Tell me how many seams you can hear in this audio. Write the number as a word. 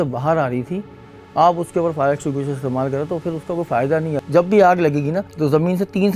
two